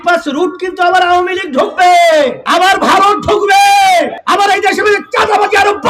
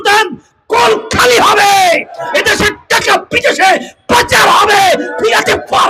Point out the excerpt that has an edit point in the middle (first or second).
first